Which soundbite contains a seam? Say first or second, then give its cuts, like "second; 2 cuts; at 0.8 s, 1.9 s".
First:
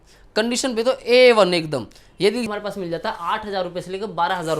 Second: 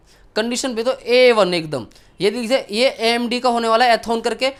first; 1 cut; at 2.5 s